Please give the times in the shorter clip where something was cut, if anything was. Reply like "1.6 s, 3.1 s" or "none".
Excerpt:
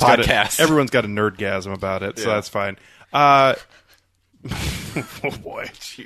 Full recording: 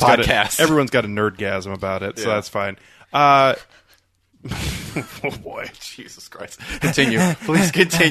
none